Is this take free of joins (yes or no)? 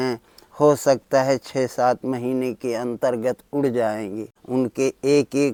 yes